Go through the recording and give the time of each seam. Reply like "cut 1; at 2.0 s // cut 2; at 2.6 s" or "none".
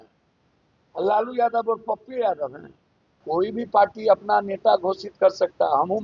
cut 1; at 3.2 s